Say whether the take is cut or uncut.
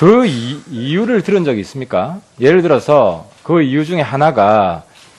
cut